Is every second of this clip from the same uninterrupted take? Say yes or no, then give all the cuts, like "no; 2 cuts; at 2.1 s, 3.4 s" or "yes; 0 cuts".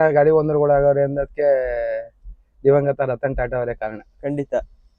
yes; 0 cuts